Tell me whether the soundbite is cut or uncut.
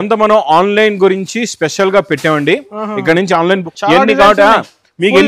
cut